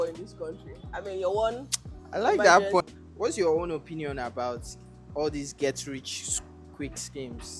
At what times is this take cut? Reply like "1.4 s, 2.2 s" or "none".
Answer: 2.8 s